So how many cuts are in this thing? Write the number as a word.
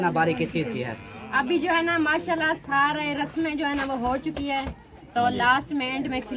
zero